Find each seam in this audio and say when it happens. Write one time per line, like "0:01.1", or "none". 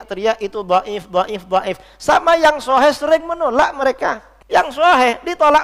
0:04.3